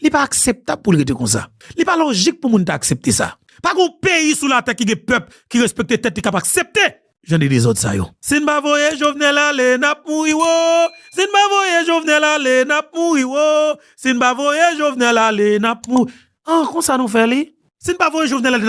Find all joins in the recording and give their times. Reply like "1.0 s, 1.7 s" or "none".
8.2 s